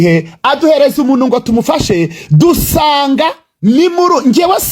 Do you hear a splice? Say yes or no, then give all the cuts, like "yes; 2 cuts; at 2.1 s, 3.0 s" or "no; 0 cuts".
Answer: no; 0 cuts